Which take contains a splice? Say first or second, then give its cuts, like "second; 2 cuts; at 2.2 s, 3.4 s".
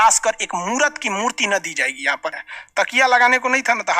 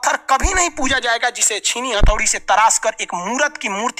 first; 1 cut; at 2.4 s